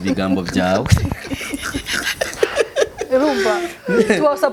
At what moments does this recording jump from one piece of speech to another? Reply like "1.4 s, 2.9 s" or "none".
none